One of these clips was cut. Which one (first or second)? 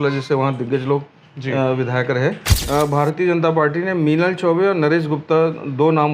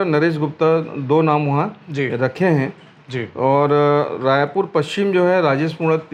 first